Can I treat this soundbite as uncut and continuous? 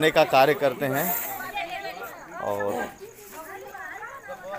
yes; 0 cuts

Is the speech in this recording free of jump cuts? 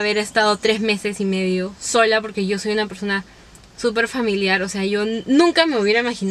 yes; 0 cuts

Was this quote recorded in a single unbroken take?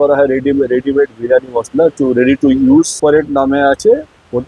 no; 1 cut; at 2.9 s

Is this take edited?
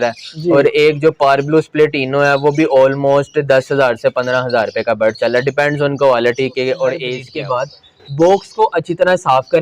yes; 1 cut; at 7.2 s

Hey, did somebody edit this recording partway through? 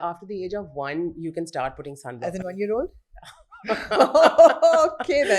no; 0 cuts

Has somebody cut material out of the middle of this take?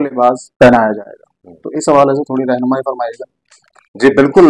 no; 0 cuts

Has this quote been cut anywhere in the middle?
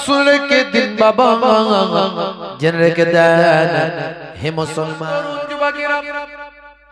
yes; 1 cut; at 5.0 s

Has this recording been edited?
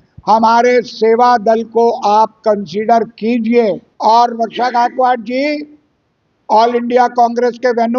yes; 1 cut; at 3.9 s

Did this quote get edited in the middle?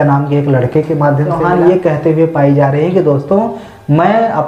yes; 1 cut; at 1.3 s

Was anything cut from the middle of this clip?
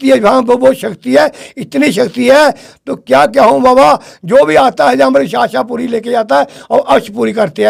no; 0 cuts

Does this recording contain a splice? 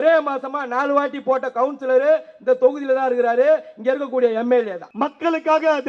yes; 1 cut; at 4.8 s

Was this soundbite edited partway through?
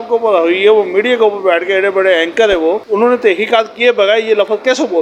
no; 0 cuts

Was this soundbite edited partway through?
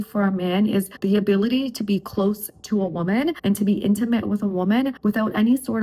yes; 3 cuts; at 0.9 s, 3.4 s, 5.0 s

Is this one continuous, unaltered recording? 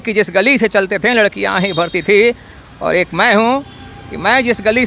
yes; 0 cuts

